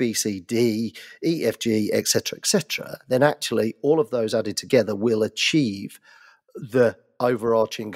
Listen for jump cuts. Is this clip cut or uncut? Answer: cut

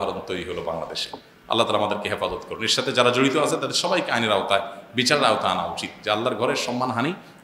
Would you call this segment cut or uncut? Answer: uncut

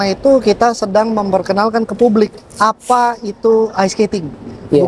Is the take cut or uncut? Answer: uncut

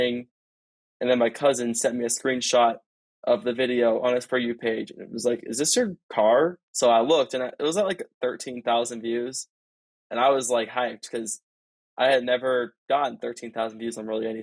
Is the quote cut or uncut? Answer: cut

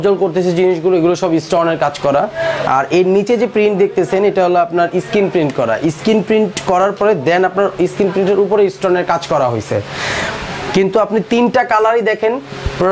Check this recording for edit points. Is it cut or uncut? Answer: uncut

